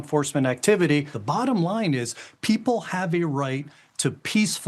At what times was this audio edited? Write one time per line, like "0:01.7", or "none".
0:01.2